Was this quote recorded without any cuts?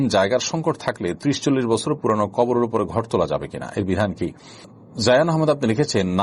no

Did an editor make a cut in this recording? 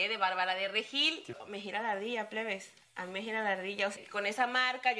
yes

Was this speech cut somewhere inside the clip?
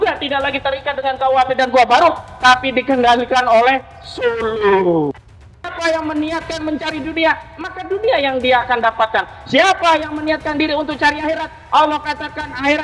yes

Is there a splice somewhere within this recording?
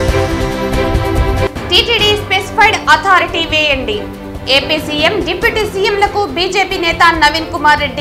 yes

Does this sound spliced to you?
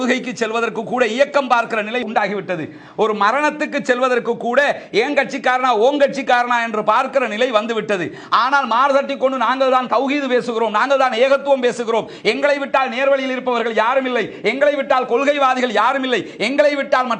no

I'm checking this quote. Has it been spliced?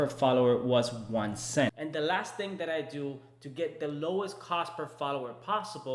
yes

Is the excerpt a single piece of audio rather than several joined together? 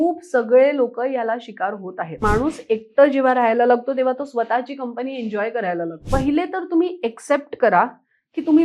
no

